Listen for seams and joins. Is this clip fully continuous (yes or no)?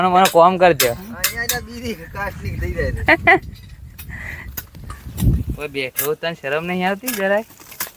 yes